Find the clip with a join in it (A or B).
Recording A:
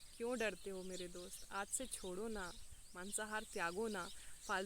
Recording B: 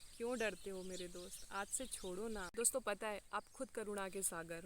B